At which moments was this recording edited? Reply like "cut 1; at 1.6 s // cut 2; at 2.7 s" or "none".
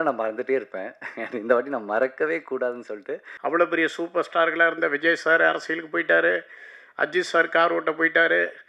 cut 1; at 3.2 s